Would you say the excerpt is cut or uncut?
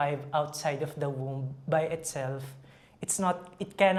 uncut